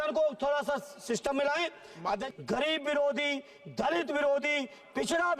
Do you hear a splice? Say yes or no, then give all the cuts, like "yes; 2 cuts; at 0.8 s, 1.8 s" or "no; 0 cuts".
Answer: yes; 1 cut; at 2.3 s